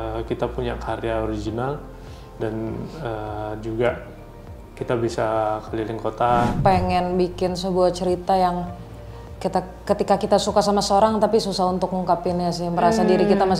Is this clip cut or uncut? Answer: cut